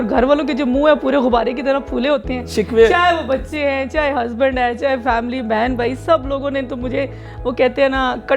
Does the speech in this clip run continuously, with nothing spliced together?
yes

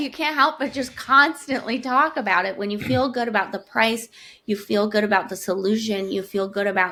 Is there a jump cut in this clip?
no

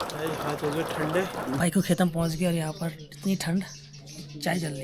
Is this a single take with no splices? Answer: no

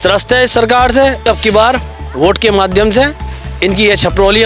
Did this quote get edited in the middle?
yes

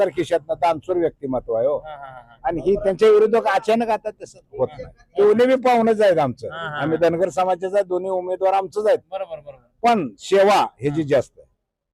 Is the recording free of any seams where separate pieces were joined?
yes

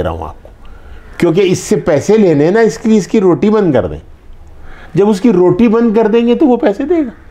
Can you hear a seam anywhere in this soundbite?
no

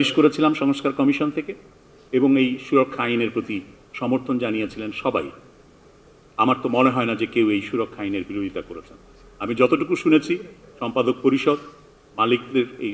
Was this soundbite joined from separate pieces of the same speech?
no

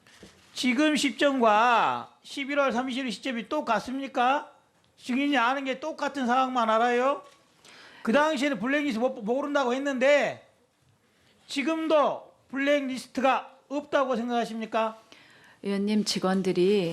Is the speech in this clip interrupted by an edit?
yes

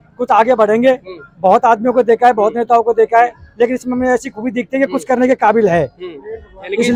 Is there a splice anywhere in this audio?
no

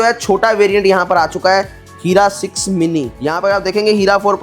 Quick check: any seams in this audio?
yes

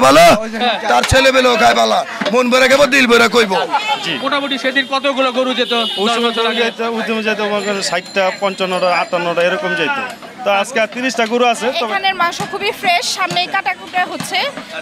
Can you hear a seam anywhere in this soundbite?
yes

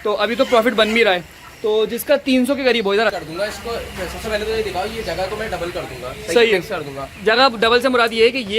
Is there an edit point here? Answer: yes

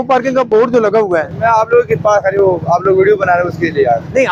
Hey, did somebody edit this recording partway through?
no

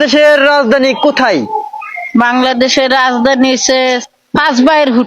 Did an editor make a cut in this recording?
yes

